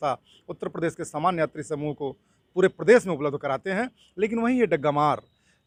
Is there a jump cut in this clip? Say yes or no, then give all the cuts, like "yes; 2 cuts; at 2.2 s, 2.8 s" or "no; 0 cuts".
no; 0 cuts